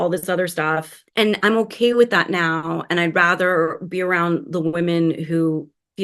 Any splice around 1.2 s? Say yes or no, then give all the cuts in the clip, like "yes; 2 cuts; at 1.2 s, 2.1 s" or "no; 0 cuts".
no; 0 cuts